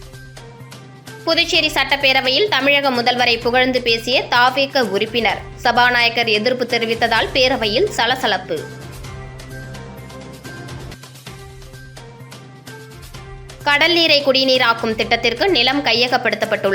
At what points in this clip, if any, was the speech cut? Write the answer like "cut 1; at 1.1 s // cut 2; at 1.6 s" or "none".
cut 1; at 0.9 s